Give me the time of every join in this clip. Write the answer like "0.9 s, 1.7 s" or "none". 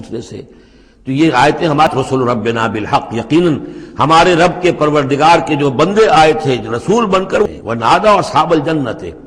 1.9 s, 7.4 s